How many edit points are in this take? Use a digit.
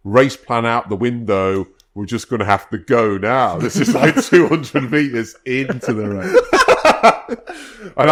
0